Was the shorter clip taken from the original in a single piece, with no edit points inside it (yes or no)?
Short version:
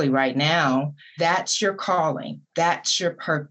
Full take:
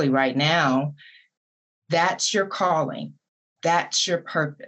no